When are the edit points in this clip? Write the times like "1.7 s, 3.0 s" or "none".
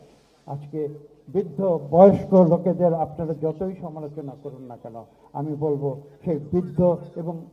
none